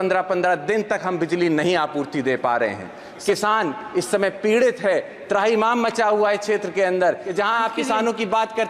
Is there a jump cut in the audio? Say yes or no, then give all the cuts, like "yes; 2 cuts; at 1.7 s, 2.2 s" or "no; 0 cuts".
yes; 2 cuts; at 3.2 s, 7.2 s